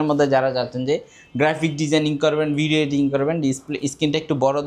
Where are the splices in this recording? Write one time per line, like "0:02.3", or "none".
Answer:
none